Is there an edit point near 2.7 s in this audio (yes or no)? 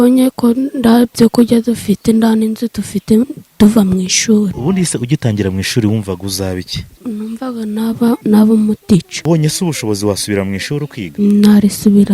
no